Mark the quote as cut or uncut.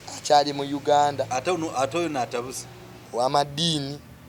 uncut